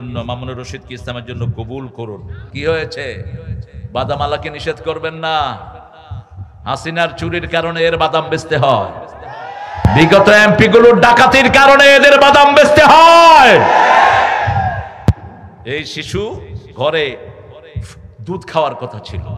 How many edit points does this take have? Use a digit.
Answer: 1